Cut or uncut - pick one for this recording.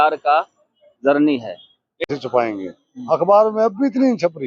cut